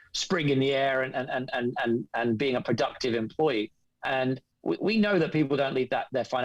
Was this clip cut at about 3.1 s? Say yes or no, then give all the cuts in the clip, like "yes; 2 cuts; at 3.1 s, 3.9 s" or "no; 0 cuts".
no; 1 cut; at 4.5 s